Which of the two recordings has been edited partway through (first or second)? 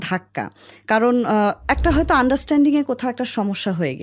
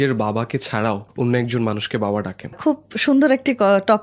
second